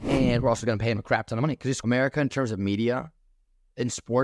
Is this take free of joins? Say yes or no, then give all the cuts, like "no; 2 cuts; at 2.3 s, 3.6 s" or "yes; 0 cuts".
no; 1 cut; at 1.8 s